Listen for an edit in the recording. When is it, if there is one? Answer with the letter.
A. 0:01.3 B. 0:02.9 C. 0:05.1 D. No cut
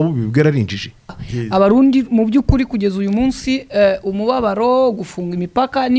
A